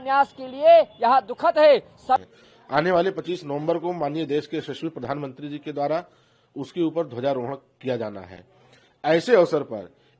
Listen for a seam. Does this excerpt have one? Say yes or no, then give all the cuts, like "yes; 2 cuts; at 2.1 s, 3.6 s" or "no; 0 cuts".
yes; 1 cut; at 2.4 s